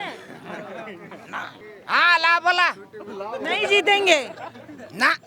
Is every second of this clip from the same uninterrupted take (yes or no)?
yes